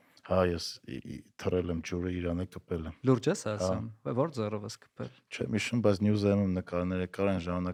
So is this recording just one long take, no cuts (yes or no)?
yes